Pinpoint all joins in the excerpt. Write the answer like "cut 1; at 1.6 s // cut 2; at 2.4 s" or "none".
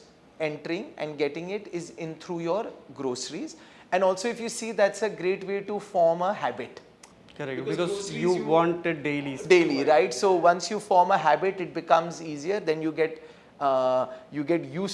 none